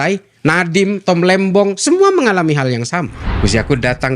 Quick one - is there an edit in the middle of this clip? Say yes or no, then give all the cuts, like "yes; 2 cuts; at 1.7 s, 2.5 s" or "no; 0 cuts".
yes; 1 cut; at 3.2 s